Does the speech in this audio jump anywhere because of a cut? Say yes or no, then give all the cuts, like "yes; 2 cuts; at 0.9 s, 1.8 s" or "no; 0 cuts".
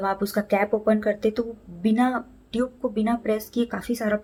no; 0 cuts